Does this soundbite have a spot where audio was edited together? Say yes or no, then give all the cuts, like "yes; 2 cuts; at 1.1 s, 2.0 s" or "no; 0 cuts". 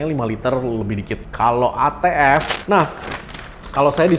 yes; 1 cut; at 2.5 s